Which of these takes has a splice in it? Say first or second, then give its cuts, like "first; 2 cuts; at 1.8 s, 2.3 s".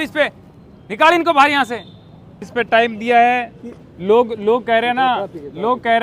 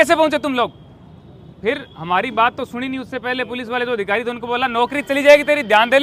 first; 1 cut; at 2.4 s